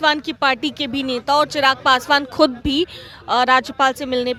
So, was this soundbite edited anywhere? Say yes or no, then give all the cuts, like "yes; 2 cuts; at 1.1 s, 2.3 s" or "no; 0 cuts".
no; 0 cuts